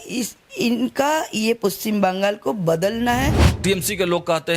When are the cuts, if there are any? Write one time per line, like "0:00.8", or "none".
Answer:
0:03.5